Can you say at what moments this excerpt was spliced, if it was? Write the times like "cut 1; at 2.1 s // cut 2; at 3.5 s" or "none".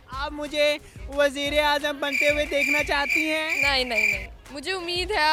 none

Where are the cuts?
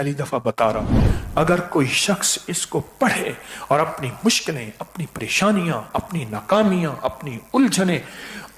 cut 1; at 1.0 s

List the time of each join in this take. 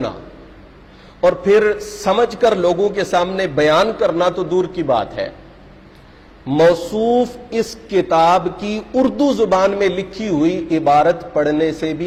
none

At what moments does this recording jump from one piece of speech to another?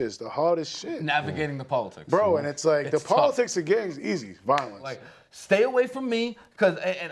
cut 1; at 5.0 s

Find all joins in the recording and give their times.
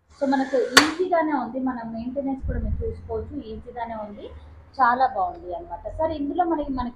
none

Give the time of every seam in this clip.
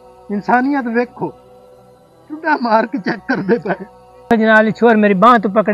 cut 1; at 4.3 s

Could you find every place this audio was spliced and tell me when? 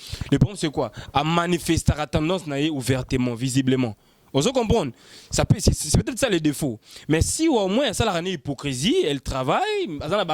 none

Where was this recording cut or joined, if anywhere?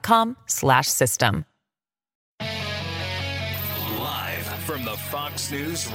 cut 1; at 2.2 s // cut 2; at 3.8 s

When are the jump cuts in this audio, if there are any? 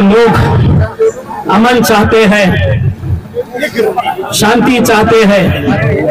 none

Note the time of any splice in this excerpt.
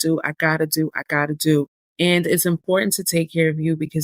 cut 1; at 1.8 s

